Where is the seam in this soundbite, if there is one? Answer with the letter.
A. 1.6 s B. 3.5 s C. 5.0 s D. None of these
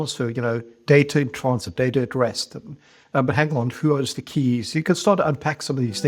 D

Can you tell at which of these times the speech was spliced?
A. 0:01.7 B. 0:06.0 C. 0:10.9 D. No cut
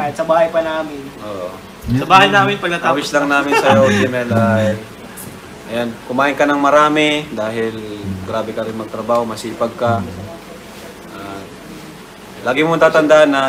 D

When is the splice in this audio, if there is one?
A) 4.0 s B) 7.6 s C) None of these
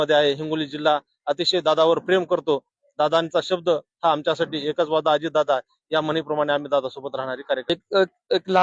B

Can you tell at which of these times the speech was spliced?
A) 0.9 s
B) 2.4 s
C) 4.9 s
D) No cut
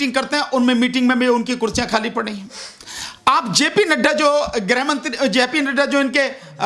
D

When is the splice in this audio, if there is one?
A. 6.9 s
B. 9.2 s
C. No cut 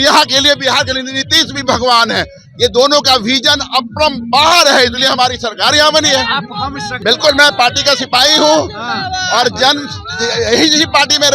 A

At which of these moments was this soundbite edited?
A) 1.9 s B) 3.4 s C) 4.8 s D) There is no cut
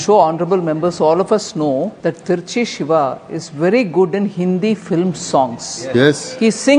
A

